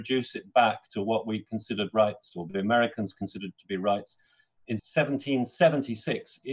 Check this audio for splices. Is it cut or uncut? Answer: uncut